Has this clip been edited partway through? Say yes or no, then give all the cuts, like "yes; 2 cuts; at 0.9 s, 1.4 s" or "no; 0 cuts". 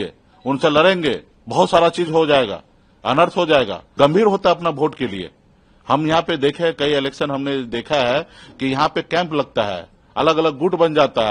yes; 2 cuts; at 1.3 s, 3.8 s